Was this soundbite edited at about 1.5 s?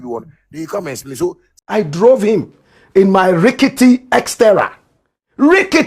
yes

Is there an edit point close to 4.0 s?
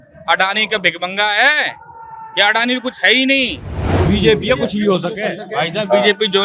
yes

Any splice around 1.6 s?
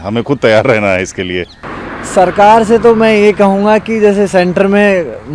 yes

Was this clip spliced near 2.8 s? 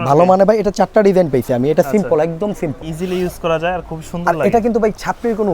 yes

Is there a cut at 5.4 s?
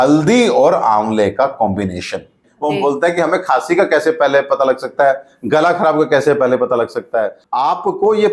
no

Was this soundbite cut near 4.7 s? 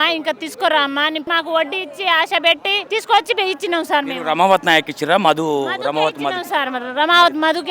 no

